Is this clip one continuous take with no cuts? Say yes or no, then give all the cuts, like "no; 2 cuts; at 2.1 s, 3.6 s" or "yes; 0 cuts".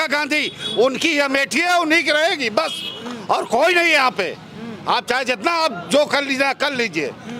yes; 0 cuts